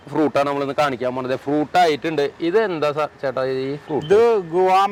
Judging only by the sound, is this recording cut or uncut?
uncut